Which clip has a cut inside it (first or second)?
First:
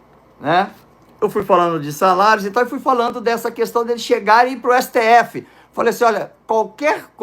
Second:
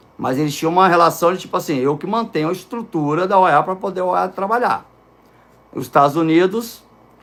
first